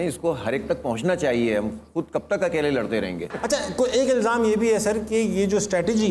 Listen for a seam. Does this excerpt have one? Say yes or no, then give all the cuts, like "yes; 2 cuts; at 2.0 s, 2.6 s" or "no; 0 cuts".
yes; 1 cut; at 3.3 s